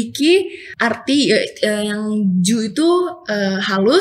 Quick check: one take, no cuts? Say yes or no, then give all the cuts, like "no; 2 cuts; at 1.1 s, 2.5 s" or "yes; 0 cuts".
yes; 0 cuts